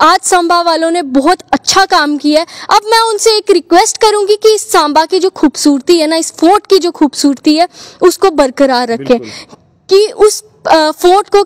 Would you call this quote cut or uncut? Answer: uncut